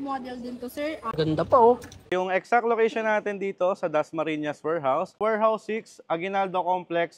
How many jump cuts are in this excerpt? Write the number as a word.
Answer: three